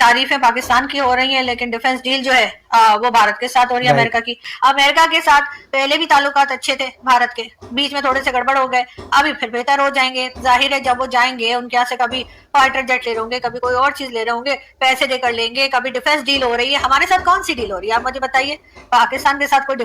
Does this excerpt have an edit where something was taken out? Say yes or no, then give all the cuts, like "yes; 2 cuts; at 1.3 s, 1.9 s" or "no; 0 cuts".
yes; 1 cut; at 4.4 s